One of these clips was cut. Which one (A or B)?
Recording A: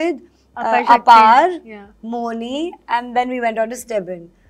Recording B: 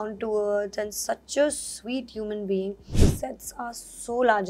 B